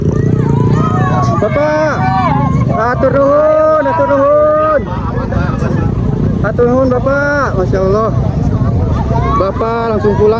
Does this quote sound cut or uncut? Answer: uncut